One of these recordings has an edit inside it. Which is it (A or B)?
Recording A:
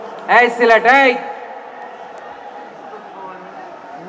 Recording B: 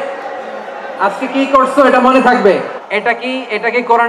B